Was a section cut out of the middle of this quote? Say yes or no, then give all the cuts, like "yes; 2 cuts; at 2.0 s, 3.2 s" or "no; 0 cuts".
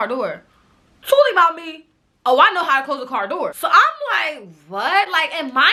no; 0 cuts